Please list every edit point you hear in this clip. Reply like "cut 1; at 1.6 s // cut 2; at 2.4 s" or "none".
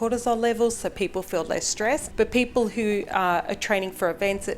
cut 1; at 2.1 s